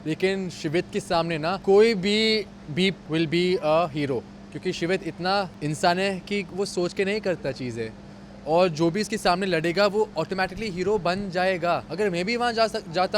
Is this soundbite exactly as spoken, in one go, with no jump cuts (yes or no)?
no